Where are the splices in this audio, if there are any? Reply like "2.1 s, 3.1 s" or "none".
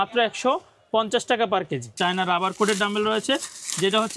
1.9 s